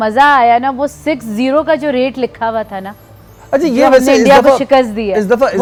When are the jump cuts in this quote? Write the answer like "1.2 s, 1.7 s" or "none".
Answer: none